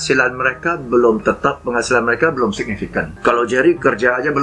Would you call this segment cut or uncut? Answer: cut